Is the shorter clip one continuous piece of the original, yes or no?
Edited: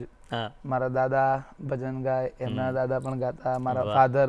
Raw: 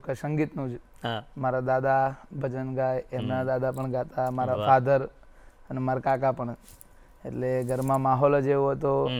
yes